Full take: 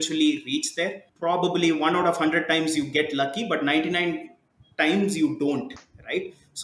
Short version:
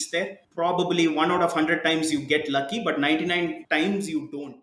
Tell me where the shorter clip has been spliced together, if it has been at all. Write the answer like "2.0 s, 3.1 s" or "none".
3.6 s

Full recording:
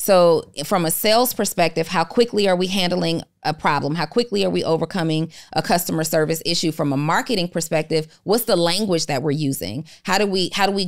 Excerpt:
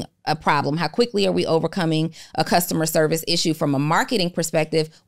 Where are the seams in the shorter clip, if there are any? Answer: none

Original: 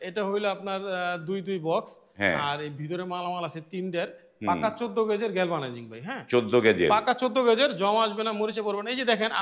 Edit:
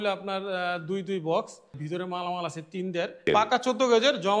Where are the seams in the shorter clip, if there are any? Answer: 1.7 s, 3.3 s

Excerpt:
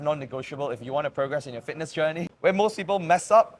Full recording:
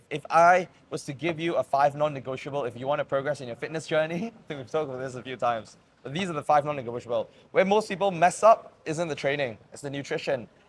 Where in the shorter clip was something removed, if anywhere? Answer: 2.3 s

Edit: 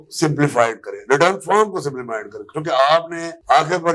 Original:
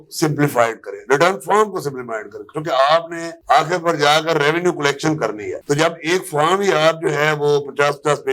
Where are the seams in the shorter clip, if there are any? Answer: none

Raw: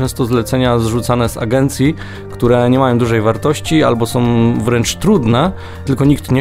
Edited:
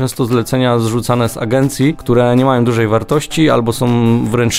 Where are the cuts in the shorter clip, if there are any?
2.0 s

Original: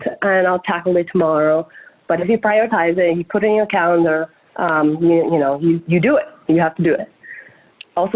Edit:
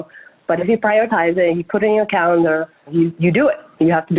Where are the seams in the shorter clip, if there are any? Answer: 2.9 s

